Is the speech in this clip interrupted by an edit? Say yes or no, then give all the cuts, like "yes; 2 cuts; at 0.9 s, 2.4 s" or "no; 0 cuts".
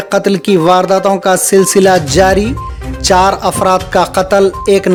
no; 0 cuts